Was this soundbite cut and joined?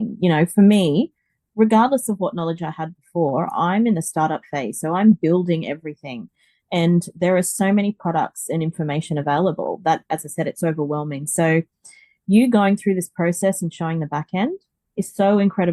no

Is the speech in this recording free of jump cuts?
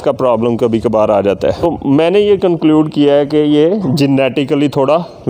no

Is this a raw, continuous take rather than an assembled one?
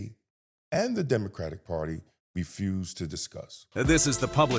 no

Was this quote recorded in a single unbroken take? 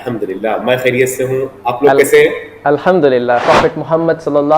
no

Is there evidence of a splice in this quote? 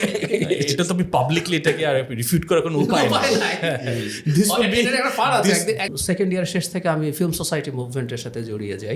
yes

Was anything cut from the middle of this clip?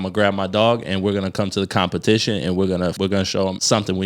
yes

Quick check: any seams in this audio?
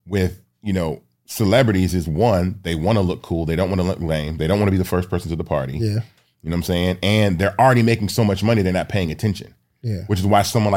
no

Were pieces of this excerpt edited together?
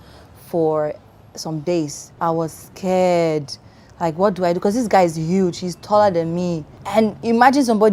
yes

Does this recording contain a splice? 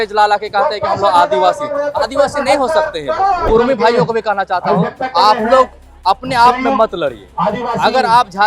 yes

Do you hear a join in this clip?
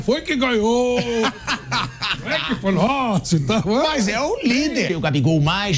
yes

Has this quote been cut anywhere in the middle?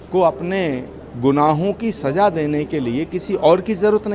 no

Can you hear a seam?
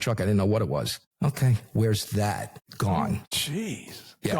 yes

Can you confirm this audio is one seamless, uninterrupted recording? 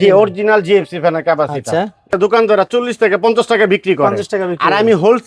no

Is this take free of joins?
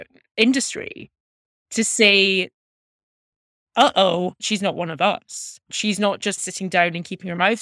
no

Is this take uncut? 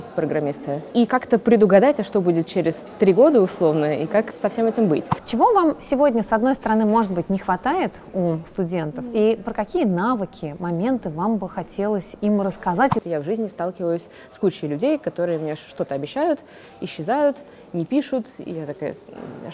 no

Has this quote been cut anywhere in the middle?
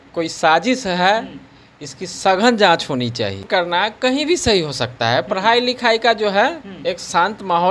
no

